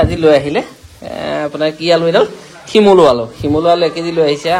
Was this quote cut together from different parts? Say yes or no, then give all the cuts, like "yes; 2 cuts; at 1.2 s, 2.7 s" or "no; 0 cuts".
no; 0 cuts